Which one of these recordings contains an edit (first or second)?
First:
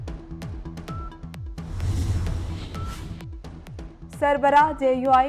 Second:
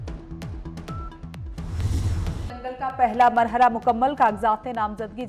first